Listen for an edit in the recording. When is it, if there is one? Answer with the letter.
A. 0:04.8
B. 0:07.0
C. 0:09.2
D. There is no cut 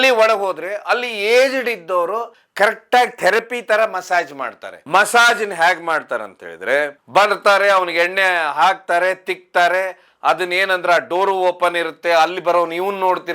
A